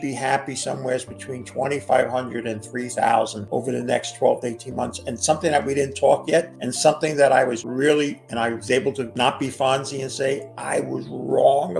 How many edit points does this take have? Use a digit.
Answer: 5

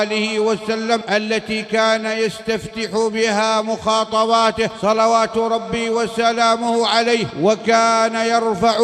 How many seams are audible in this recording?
3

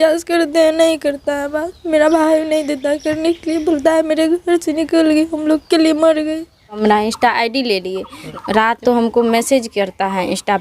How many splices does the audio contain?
2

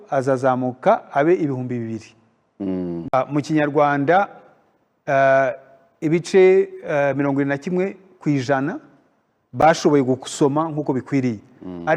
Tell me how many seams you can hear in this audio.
1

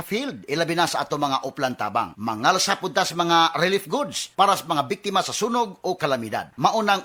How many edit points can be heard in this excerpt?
0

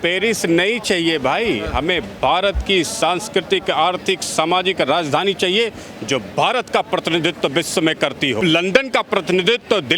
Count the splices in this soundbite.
1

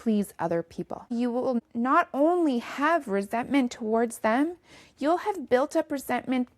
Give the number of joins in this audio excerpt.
1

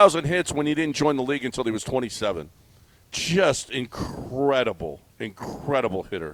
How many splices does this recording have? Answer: 0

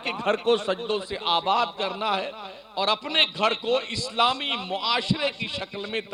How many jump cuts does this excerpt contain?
0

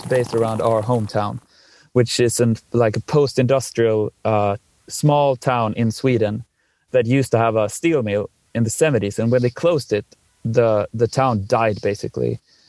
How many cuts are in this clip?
0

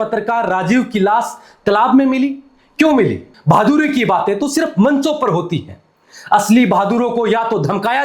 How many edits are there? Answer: 1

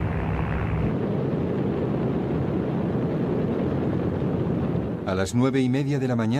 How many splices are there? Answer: 1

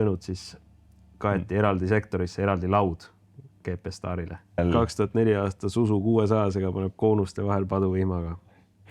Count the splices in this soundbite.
1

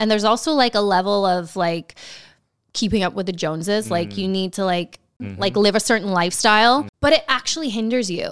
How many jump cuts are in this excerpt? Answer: 2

